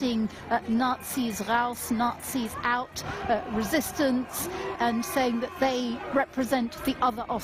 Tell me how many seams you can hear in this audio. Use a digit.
1